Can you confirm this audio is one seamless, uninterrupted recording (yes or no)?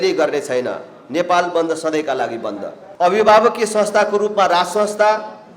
no